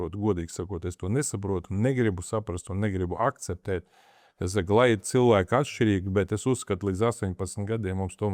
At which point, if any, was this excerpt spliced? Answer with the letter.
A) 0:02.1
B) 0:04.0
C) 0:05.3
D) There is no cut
D